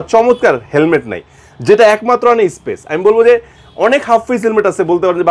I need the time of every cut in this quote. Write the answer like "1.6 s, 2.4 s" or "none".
none